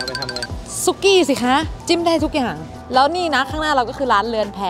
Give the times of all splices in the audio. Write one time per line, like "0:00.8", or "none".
0:02.9